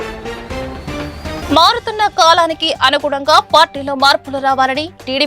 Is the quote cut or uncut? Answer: cut